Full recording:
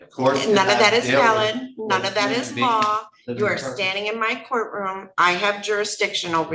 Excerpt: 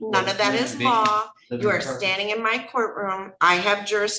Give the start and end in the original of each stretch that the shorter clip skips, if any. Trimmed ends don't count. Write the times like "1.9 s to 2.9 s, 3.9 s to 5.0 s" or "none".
none